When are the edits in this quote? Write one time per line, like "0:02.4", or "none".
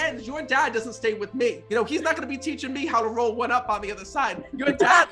0:01.6